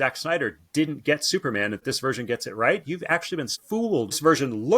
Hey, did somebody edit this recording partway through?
yes; 2 cuts; at 1.8 s, 3.8 s

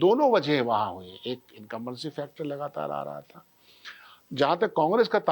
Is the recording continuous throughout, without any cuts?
yes; 0 cuts

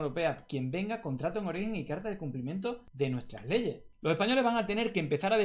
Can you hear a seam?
yes; 2 cuts; at 2.9 s, 3.9 s

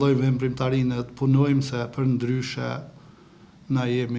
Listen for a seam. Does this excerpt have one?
no; 0 cuts

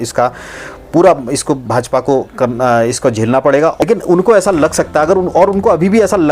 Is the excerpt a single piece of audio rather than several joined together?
no; 1 cut; at 3.8 s

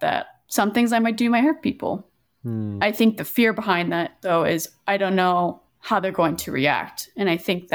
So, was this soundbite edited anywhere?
no; 0 cuts

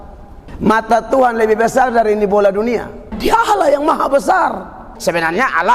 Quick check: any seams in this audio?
yes; 2 cuts; at 3.0 s, 4.9 s

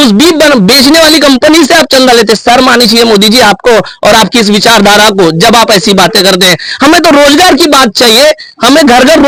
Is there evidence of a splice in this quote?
no; 0 cuts

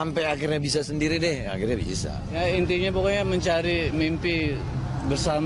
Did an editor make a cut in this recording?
yes; 1 cut; at 3.2 s

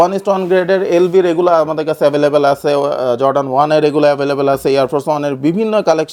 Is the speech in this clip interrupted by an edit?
no; 0 cuts

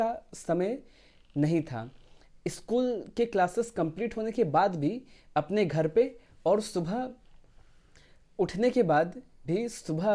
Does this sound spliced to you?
no; 0 cuts

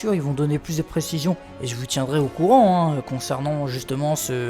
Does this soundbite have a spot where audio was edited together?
yes; 1 cut; at 2.6 s

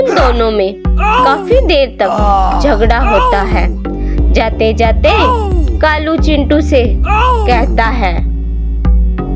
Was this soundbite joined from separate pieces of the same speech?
no; 0 cuts

